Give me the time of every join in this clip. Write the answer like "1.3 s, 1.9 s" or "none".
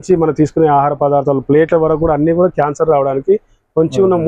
none